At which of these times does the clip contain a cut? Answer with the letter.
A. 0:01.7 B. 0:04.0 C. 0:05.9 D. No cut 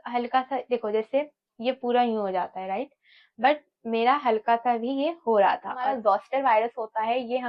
C